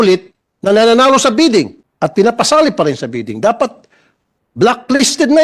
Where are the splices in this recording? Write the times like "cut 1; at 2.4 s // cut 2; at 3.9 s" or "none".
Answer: cut 1; at 1.8 s